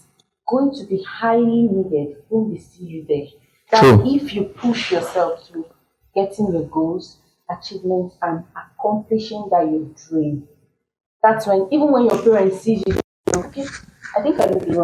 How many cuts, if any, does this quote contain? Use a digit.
0